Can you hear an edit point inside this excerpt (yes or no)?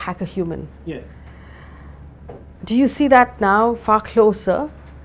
no